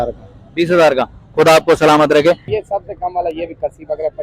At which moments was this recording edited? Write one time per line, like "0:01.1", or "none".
0:02.5

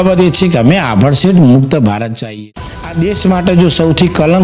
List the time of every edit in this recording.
0:02.3

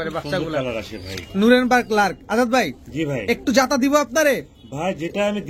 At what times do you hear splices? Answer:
none

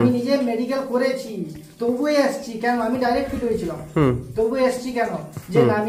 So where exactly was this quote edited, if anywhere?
none

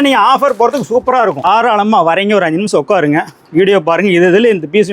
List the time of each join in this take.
0:01.5

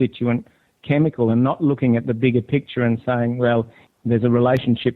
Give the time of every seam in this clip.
0:03.8

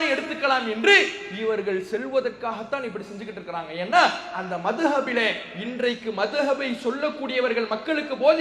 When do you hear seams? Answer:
none

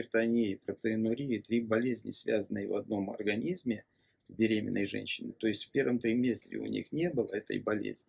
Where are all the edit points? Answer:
none

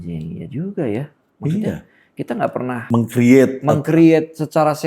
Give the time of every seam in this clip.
0:02.8

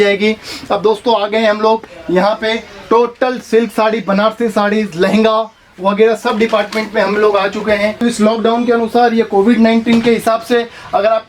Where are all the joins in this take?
0:08.0

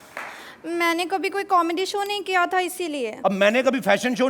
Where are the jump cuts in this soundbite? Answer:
0:03.1

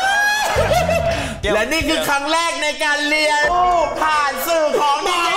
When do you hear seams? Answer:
none

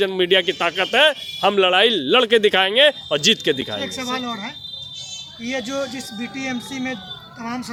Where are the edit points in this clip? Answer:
none

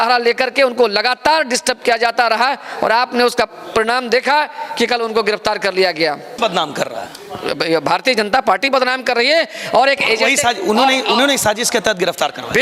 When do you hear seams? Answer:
0:06.4

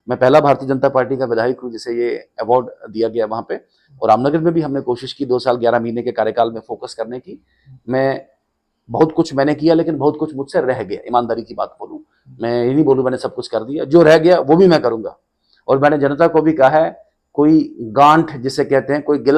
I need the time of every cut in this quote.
none

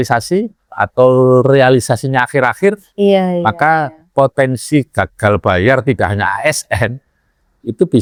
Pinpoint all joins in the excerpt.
none

